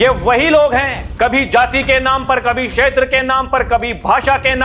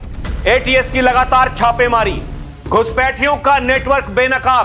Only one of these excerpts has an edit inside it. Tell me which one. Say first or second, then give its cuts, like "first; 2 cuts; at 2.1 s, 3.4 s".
first; 1 cut; at 1.0 s